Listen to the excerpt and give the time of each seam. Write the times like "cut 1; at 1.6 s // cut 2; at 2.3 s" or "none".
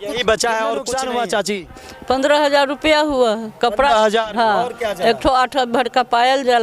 cut 1; at 0.9 s